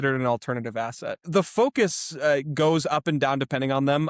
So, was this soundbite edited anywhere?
yes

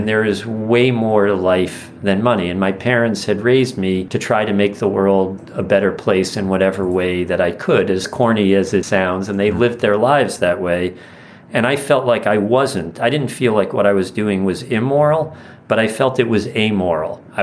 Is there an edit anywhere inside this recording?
no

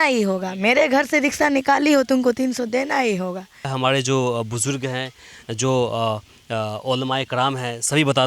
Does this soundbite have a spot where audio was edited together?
yes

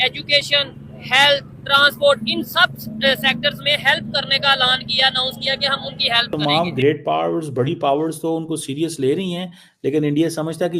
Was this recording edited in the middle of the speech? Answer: yes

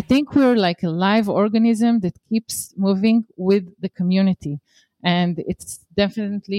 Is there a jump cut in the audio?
no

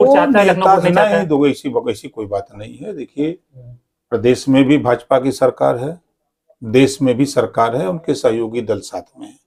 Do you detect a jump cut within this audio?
no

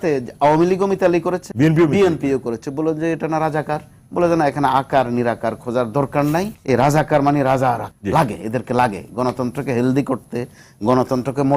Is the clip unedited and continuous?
no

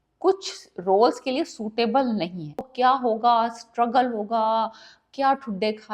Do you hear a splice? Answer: yes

